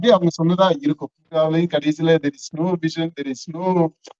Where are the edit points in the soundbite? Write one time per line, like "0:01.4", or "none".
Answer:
0:01.2